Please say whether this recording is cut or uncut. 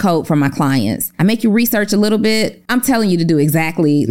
cut